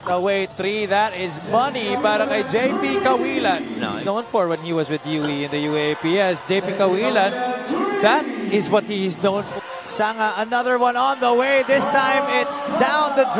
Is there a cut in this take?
yes; 2 cuts; at 4.0 s, 9.5 s

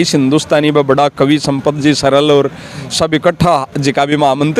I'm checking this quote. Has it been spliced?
no; 0 cuts

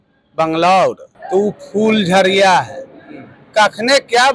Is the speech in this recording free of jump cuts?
no; 1 cut; at 1.1 s

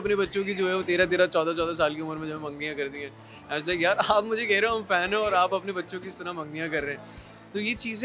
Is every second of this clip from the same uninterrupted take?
yes; 0 cuts

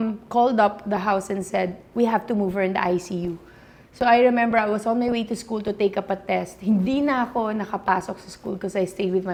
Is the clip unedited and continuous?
yes; 0 cuts

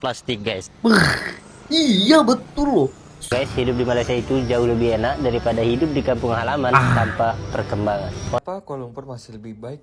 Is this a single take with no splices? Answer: no; 2 cuts; at 3.3 s, 8.4 s

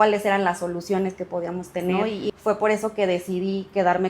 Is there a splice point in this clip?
yes; 1 cut; at 2.3 s

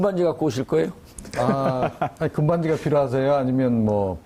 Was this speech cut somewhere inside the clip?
yes; 1 cut; at 2.6 s

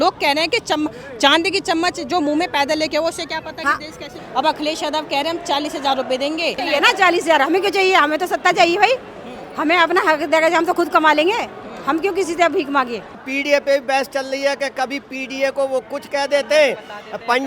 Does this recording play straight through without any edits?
no; 3 cuts; at 4.2 s, 6.6 s, 13.3 s

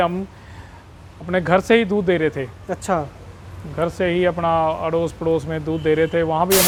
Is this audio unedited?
yes; 0 cuts

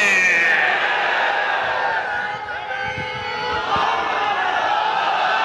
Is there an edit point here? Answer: no; 0 cuts

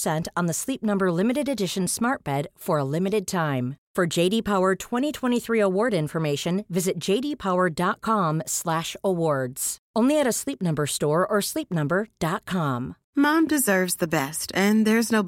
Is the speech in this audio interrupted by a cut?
yes; 1 cut; at 13.0 s

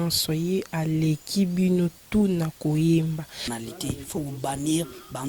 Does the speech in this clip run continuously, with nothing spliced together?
no; 1 cut; at 3.0 s

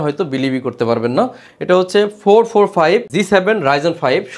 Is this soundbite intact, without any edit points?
yes; 0 cuts

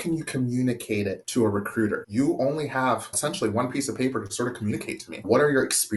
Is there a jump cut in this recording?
yes; 4 cuts; at 1.2 s, 2.1 s, 3.1 s, 5.2 s

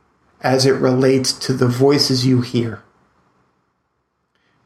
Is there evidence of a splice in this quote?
yes; 1 cut; at 1.4 s

